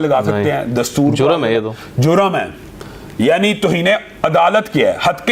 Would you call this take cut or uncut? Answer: uncut